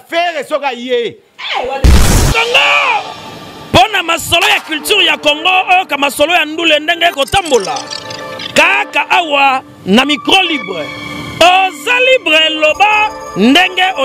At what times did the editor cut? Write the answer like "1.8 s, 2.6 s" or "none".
1.8 s